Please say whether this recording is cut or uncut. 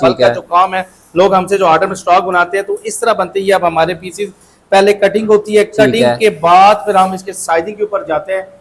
uncut